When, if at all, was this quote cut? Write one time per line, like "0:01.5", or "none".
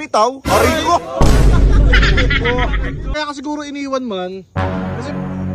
0:03.1